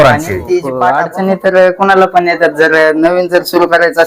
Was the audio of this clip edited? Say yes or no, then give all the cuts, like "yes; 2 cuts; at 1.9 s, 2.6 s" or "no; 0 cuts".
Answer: yes; 1 cut; at 1.0 s